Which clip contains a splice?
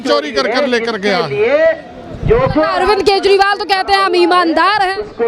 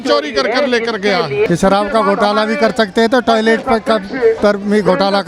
second; 2 cuts; at 1.5 s, 4.4 s

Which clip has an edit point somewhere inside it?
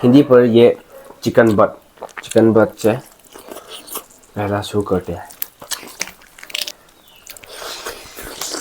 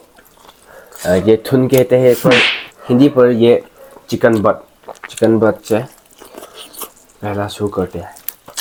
first; 1 cut; at 6.8 s

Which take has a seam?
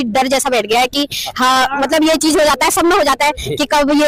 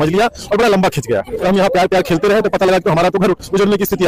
second; 1 cut; at 1.3 s

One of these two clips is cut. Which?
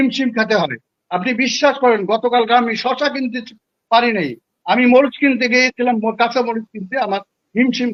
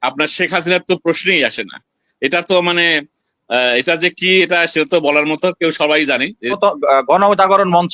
second; 1 cut; at 6.5 s

